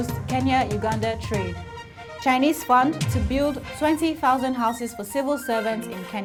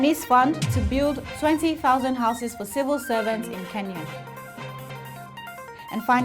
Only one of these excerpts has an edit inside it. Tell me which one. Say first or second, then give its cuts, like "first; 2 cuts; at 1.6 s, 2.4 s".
second; 1 cut; at 4.9 s